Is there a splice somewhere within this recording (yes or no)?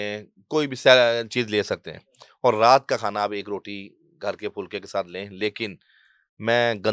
no